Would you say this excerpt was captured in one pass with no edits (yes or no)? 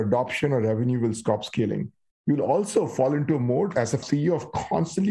no